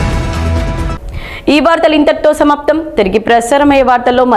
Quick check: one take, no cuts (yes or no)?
yes